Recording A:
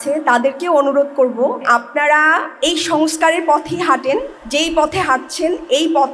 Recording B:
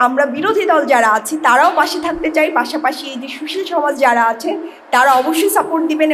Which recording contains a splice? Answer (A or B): A